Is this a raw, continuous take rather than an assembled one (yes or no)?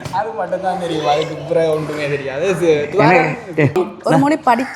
no